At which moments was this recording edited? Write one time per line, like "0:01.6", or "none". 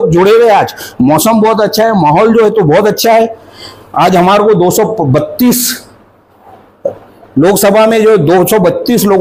none